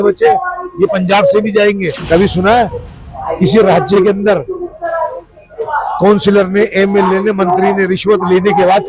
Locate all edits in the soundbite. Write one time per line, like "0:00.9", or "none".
0:02.0